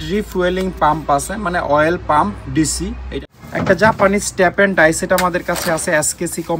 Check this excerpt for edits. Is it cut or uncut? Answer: cut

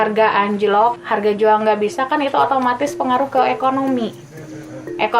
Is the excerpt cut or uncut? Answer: cut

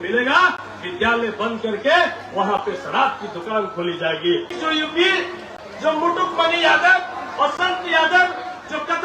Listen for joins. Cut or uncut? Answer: cut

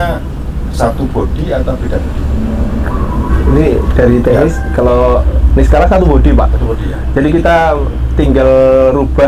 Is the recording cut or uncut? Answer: uncut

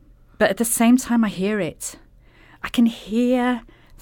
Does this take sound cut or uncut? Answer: uncut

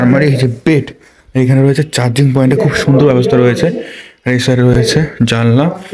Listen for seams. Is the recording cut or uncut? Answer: uncut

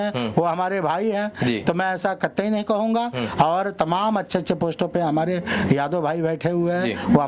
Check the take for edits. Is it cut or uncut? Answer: uncut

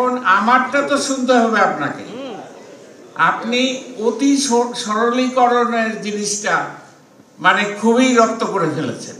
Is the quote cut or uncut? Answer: uncut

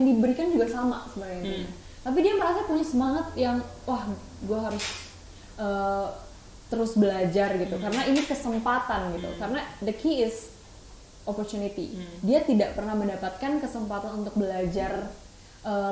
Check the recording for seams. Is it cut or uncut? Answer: uncut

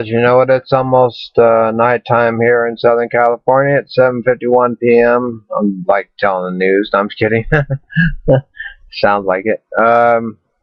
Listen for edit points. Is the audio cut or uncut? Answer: cut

